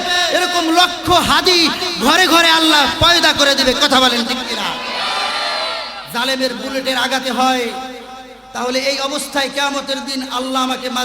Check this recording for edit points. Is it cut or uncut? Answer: cut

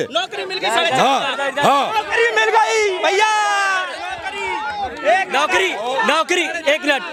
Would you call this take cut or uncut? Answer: uncut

